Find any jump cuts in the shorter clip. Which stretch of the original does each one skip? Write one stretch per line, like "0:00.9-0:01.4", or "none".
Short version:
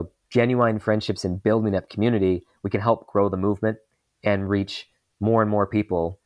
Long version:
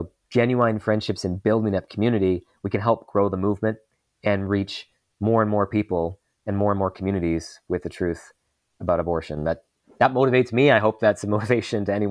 none